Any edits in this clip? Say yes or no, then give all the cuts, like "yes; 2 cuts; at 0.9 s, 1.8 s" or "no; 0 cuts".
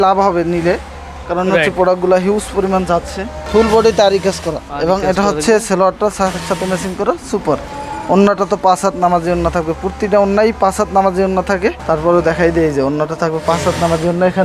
no; 0 cuts